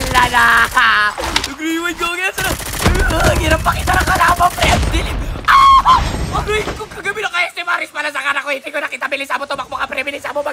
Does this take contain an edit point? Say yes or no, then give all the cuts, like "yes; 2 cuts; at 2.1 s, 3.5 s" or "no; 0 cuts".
no; 0 cuts